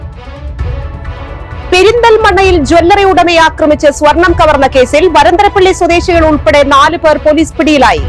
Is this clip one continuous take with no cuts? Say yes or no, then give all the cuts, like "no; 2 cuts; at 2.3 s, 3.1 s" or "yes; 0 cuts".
no; 1 cut; at 1.5 s